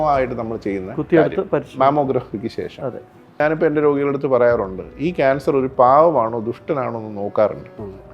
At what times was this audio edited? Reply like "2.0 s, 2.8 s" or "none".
3.4 s